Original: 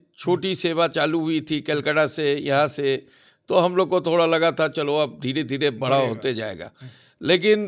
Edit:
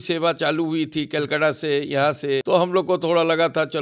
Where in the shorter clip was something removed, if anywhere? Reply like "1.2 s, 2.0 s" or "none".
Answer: 2.4 s